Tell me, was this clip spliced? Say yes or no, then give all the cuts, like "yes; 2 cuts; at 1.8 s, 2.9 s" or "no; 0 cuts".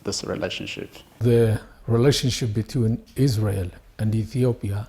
yes; 1 cut; at 1.2 s